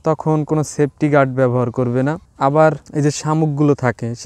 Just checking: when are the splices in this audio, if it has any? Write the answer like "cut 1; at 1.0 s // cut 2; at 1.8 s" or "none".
cut 1; at 2.3 s // cut 2; at 2.8 s